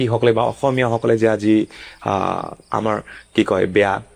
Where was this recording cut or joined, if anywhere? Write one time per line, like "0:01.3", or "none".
none